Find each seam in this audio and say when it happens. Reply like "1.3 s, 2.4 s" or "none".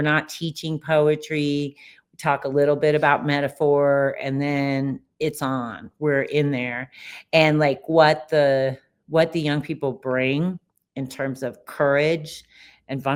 none